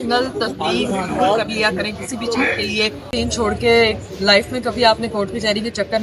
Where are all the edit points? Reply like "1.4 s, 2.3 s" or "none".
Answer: 3.1 s